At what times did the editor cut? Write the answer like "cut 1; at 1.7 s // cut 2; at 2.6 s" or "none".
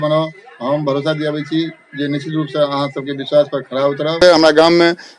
cut 1; at 4.2 s